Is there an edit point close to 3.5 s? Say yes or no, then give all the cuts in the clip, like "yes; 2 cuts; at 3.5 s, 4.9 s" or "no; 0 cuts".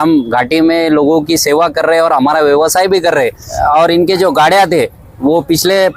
yes; 1 cut; at 3.5 s